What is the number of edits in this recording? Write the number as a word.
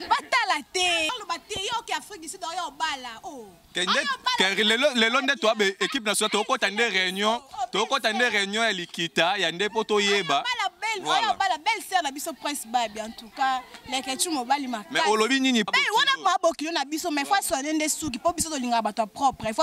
two